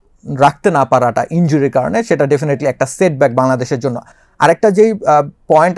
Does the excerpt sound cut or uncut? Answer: uncut